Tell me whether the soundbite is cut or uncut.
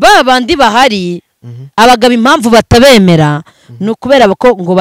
uncut